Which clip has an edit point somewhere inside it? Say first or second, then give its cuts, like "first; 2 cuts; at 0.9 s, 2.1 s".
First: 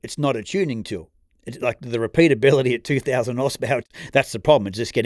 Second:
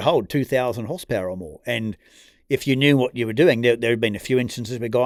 first; 1 cut; at 3.9 s